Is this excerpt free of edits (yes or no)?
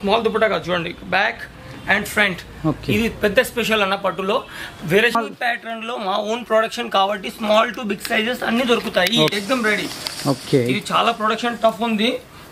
no